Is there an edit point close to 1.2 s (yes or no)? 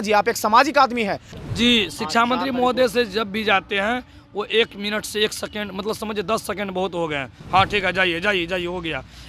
yes